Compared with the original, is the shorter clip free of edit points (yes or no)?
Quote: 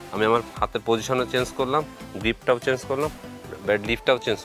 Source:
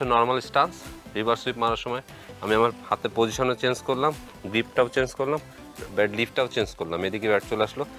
yes